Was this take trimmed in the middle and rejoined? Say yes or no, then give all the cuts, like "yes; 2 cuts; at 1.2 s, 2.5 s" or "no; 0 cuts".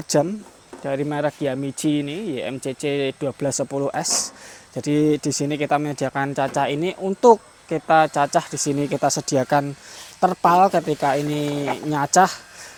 no; 0 cuts